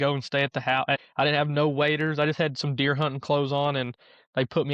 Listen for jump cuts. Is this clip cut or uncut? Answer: cut